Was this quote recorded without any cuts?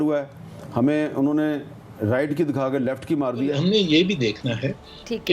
no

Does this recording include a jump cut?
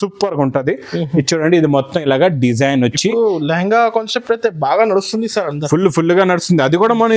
no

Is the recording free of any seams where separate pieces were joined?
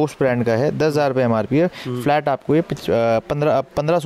yes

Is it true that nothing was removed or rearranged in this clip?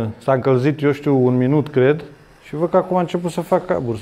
yes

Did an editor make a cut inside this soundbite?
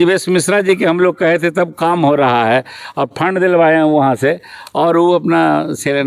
no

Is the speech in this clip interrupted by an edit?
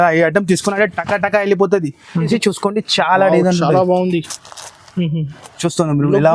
yes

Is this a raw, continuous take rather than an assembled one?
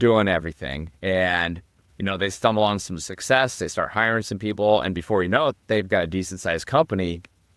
yes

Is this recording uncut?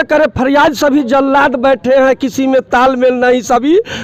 yes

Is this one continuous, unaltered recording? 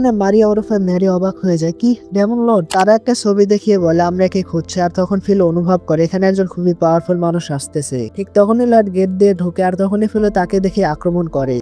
no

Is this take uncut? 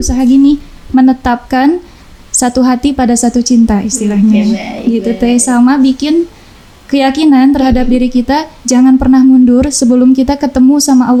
yes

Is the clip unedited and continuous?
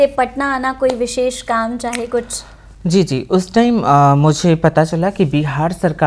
yes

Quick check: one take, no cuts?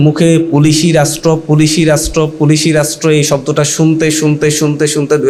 yes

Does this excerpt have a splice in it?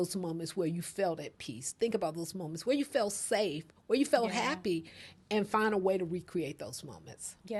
no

